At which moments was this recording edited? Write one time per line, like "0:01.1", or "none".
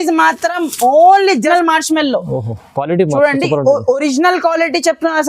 0:01.5